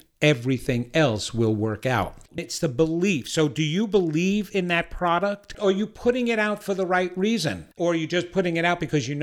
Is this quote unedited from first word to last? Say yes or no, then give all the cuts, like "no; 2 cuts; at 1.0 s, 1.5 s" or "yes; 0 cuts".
no; 3 cuts; at 2.4 s, 5.6 s, 7.7 s